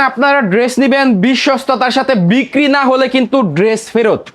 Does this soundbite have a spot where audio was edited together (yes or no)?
no